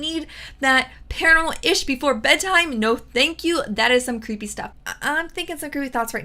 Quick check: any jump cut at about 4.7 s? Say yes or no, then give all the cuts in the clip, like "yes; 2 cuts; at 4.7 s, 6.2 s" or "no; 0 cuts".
yes; 1 cut; at 4.7 s